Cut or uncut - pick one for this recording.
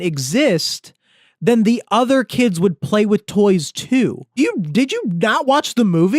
cut